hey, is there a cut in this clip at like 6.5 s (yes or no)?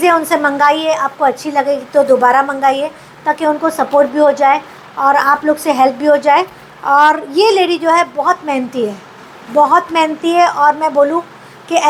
no